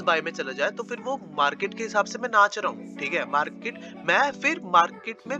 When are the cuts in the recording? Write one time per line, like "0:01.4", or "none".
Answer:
none